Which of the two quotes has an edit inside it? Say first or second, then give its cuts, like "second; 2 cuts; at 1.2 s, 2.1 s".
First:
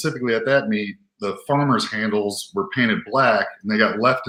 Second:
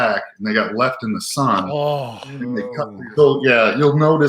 second; 1 cut; at 2.8 s